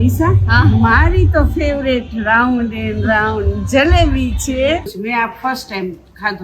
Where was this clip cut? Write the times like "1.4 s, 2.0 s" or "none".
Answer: 4.9 s